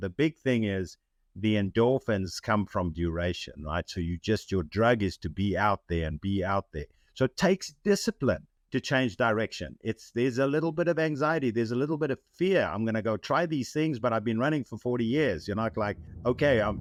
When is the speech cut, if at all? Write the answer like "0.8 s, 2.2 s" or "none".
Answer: none

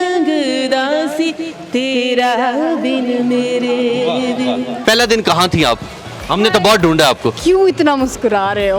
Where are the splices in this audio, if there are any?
4.7 s, 7.4 s

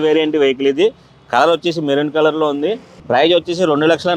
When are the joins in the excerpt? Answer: 2.9 s

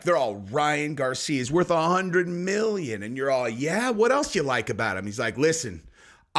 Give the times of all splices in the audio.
none

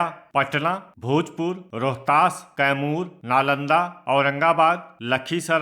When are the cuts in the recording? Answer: 0.8 s, 1.6 s, 3.1 s

